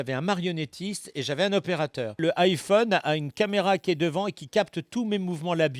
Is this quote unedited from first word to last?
no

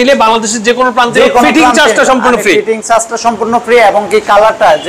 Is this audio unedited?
yes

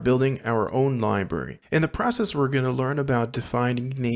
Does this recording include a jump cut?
yes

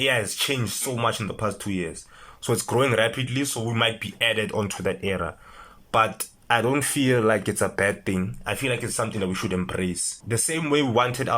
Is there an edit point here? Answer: yes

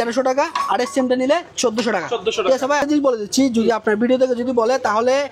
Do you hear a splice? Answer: yes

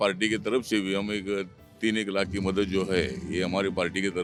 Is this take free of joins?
yes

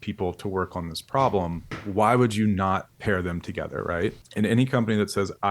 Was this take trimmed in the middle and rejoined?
yes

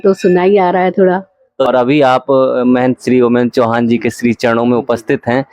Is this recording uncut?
no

